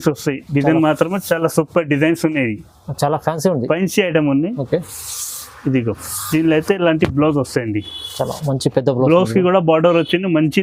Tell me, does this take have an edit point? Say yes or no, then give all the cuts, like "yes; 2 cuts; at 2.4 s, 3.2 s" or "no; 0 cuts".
no; 0 cuts